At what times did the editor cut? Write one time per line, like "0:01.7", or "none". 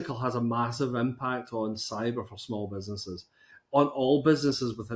none